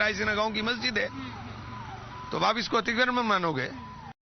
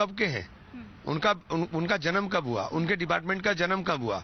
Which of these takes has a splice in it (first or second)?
first